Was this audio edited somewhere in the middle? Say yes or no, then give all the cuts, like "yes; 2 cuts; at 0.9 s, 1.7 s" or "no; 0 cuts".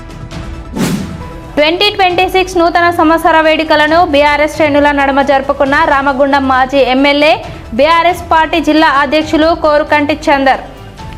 yes; 1 cut; at 0.9 s